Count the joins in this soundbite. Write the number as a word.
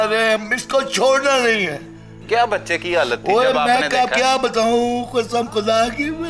one